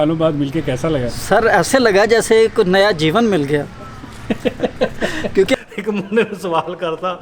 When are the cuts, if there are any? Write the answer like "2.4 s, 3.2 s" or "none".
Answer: 1.1 s, 5.5 s

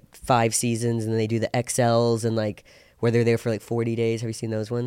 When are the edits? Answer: none

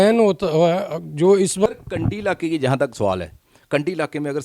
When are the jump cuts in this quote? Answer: 1.8 s

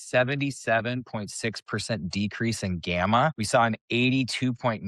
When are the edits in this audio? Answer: 3.4 s

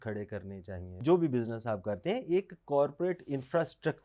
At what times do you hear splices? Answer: 0.9 s

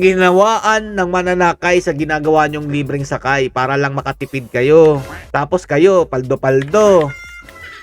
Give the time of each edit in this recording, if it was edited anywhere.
none

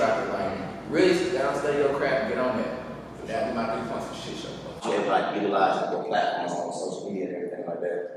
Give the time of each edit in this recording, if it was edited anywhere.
4.8 s

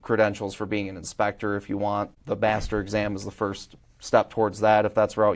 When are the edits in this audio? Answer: 2.2 s

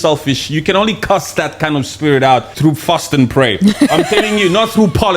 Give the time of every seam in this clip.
2.5 s

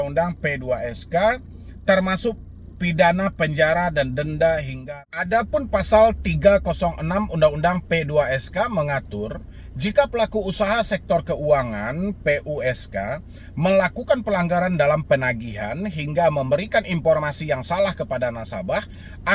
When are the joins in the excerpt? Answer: 4.8 s

